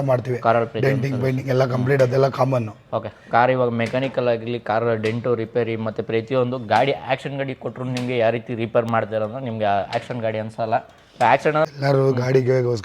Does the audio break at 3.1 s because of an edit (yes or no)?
no